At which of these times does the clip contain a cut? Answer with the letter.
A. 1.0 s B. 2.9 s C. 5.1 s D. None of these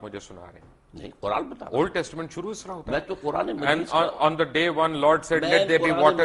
D